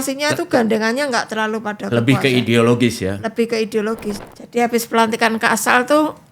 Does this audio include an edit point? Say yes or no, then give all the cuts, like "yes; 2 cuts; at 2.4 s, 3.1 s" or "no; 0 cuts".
yes; 1 cut; at 4.2 s